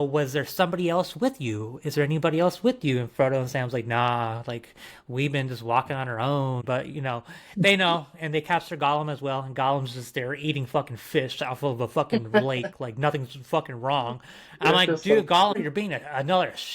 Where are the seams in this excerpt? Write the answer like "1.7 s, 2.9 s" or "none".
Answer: 6.6 s, 15.5 s